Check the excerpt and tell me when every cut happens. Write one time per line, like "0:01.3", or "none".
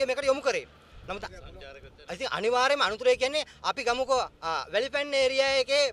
0:01.2